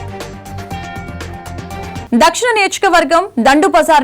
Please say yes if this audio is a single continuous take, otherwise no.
no